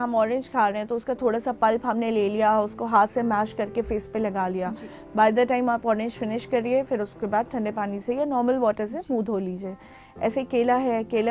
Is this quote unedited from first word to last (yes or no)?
yes